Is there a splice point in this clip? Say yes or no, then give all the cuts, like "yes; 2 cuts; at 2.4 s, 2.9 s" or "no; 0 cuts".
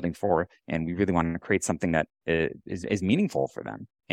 no; 0 cuts